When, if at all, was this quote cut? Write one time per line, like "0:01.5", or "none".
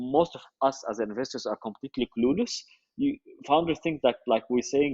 none

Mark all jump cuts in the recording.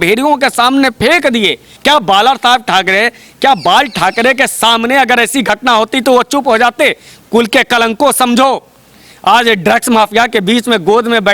0:01.7

